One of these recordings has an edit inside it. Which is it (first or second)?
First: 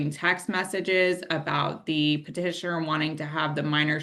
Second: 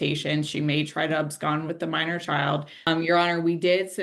second